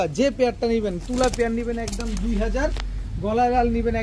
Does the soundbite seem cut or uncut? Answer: uncut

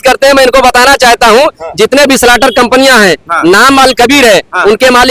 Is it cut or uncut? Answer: uncut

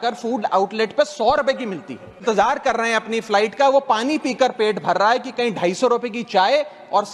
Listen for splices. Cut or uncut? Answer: cut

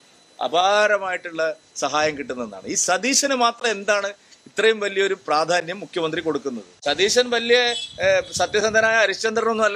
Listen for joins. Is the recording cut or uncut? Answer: cut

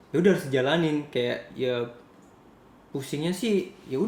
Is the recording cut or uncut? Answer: uncut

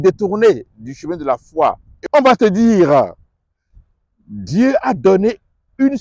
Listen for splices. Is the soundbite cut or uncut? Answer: cut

